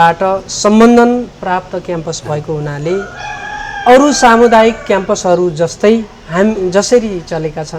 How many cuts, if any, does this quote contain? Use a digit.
0